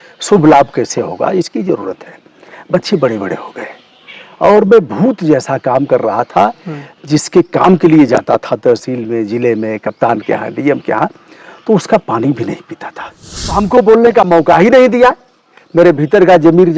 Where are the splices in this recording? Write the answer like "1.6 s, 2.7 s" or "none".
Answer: 13.6 s

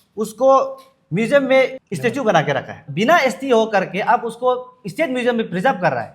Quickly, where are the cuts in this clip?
1.8 s, 2.8 s

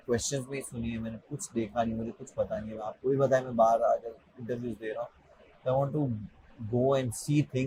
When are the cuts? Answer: none

